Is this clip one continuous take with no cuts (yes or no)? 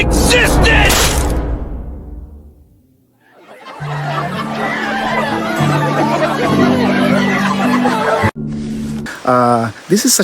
no